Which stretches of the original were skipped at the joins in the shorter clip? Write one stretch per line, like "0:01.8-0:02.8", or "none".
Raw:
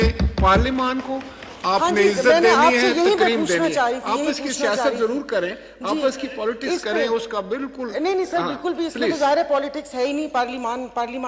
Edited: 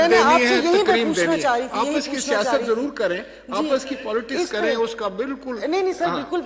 none